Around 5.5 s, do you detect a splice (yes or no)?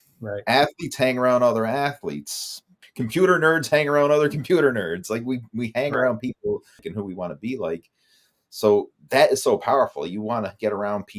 no